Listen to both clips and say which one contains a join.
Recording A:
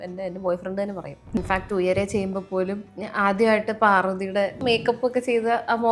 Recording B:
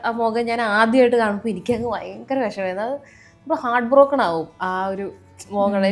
A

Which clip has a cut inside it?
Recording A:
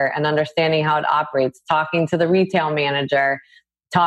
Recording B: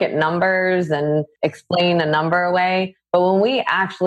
B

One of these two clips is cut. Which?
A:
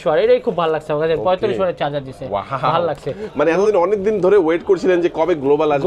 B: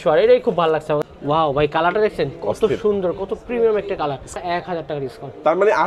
B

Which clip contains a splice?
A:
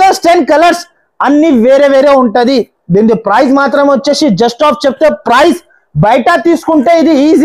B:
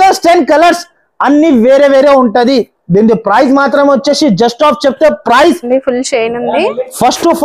B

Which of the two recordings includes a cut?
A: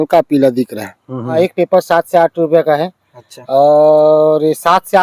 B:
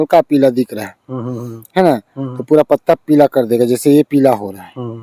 A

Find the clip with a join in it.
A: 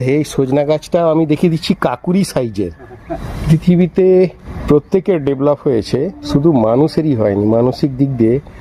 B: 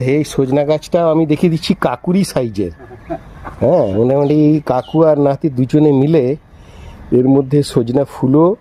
A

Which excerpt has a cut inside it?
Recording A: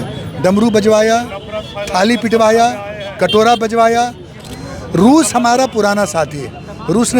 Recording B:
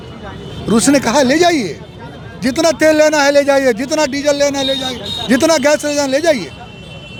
A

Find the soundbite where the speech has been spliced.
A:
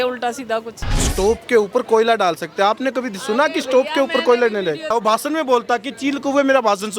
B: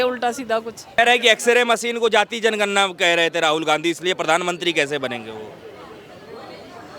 A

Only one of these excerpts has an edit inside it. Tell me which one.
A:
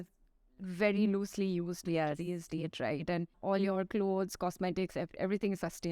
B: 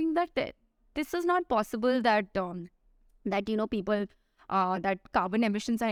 A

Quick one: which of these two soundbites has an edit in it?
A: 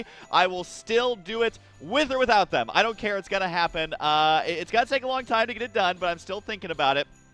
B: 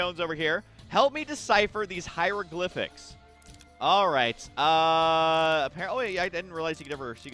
A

